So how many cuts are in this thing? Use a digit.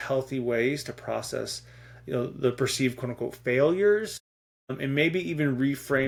0